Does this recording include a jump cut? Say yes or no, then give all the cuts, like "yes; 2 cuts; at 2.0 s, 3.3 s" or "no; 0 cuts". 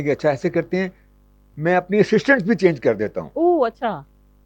no; 0 cuts